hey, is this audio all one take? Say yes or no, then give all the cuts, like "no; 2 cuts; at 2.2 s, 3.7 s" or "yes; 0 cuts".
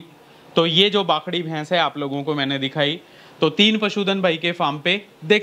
yes; 0 cuts